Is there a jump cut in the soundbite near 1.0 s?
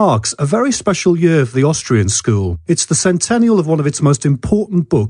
no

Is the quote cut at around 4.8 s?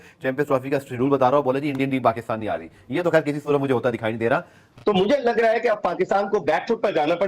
yes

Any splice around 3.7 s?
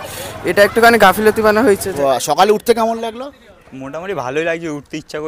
no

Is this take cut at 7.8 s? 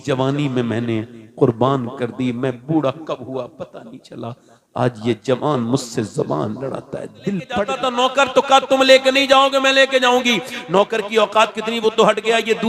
yes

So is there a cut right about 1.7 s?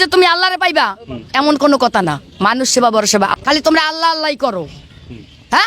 no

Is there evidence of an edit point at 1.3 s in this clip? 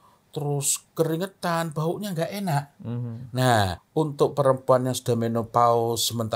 no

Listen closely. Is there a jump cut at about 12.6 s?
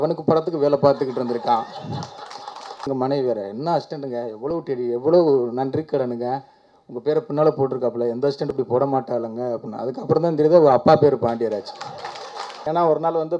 yes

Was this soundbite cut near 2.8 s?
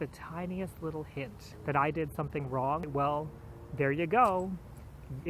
yes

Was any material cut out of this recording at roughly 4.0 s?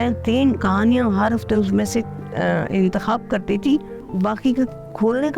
yes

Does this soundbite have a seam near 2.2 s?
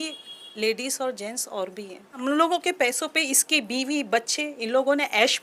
yes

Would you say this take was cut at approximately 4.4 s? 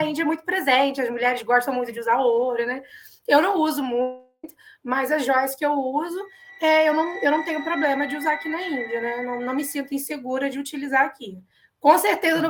no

